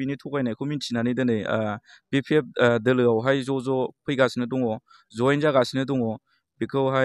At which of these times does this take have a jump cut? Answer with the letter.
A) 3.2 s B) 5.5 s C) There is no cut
C